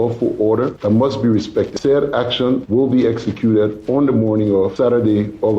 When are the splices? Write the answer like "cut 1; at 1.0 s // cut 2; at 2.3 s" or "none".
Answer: cut 1; at 1.7 s